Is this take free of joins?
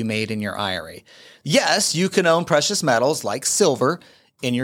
no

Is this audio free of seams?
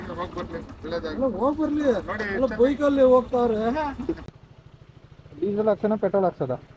no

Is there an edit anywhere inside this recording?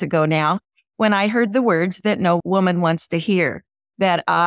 yes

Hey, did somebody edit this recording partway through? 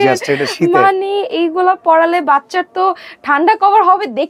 no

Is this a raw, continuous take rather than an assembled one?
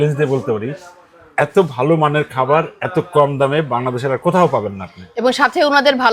yes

